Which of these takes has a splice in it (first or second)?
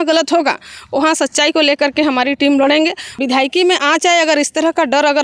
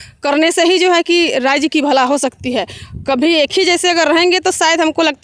first